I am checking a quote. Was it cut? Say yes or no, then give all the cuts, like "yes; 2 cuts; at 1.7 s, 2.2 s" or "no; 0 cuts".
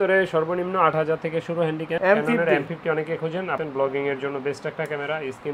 yes; 2 cuts; at 1.9 s, 3.6 s